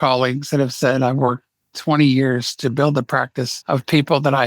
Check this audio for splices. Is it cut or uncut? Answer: cut